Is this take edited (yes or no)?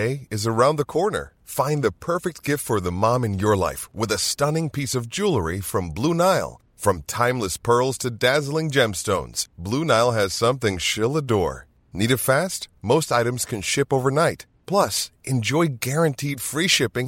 no